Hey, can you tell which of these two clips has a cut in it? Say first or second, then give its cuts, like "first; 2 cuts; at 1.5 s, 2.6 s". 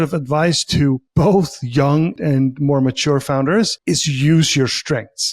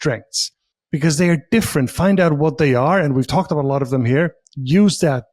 first; 3 cuts; at 1.1 s, 2.2 s, 3.8 s